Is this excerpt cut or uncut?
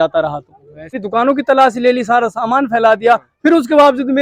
cut